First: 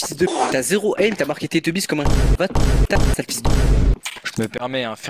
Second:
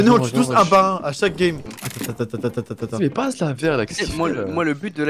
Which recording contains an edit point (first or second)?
second